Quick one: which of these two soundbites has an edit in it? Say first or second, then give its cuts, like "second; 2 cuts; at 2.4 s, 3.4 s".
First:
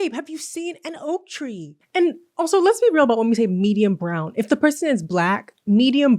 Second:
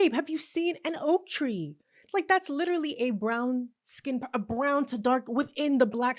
first; 1 cut; at 1.8 s